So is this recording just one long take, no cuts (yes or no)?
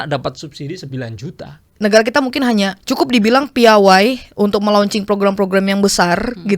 no